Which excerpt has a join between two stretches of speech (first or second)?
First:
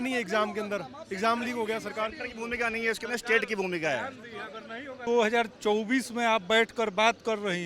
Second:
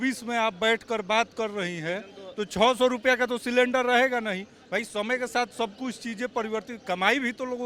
first